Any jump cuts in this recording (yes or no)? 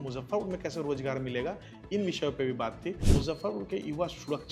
yes